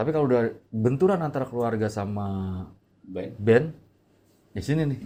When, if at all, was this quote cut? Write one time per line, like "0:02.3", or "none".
none